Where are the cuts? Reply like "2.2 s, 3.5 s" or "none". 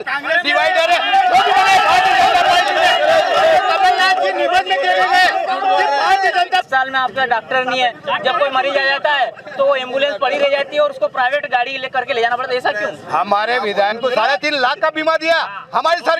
6.7 s, 13.9 s